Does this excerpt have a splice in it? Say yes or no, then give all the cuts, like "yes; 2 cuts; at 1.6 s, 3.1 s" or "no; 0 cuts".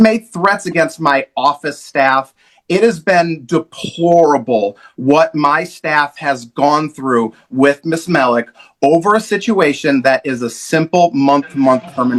no; 0 cuts